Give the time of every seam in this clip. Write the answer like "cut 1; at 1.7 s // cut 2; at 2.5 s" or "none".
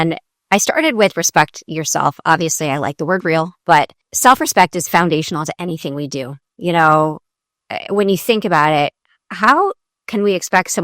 cut 1; at 4.0 s